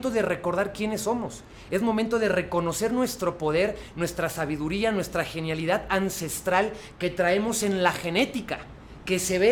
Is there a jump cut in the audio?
no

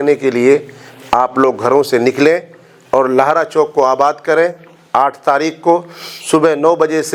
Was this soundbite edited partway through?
no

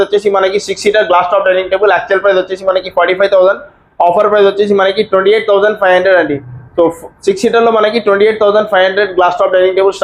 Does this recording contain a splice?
no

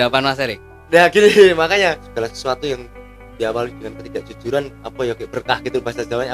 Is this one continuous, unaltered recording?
no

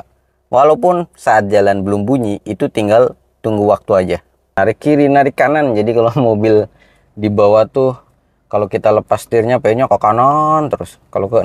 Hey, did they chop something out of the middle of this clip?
yes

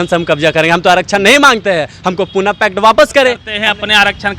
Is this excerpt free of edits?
no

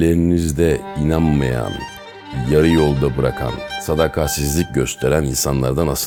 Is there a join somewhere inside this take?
no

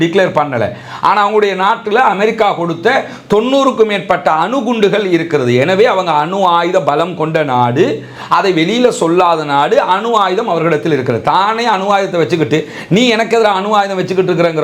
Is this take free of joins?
yes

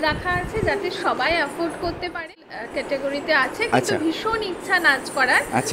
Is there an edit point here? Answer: yes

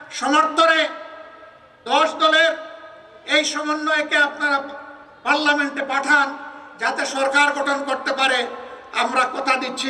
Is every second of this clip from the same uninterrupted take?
yes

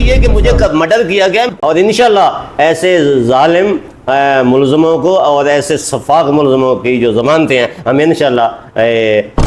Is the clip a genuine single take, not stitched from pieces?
no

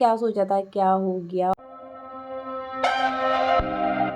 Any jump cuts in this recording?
yes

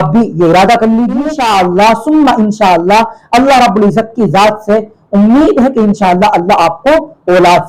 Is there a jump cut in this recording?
yes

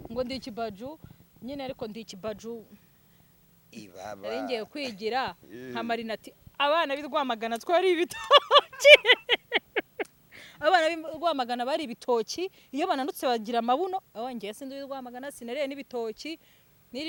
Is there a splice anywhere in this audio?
no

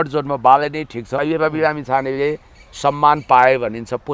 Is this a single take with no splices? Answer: no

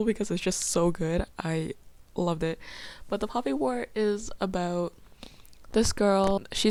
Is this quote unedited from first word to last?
yes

